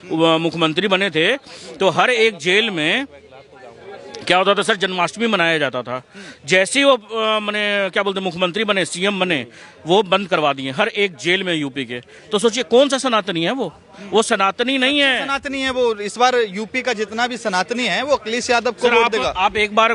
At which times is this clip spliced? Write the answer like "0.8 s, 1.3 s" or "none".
none